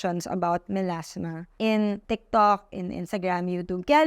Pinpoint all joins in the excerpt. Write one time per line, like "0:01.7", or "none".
0:01.4
0:02.0